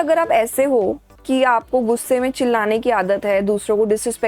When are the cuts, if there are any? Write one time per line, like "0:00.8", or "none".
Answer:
0:01.1

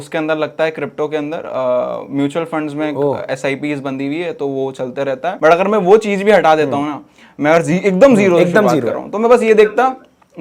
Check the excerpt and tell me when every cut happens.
0:05.4

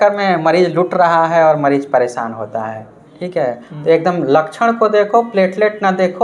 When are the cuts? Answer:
none

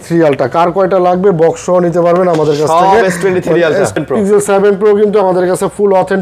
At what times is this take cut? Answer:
0:04.0

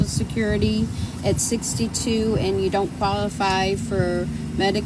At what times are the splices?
none

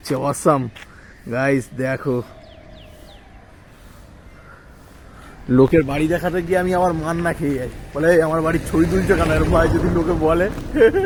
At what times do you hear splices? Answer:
none

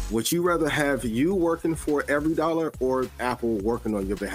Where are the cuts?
0:03.2

